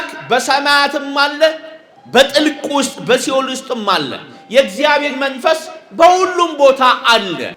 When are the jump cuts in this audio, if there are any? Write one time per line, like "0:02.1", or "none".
none